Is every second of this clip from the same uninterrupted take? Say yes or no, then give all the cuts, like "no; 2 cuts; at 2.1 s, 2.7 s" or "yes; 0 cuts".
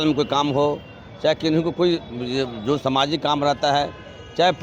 yes; 0 cuts